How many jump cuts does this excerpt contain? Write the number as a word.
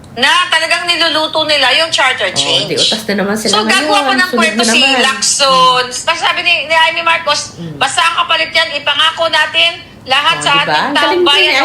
one